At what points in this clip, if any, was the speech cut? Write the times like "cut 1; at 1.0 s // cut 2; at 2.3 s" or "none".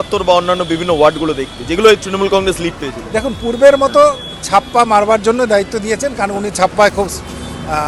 none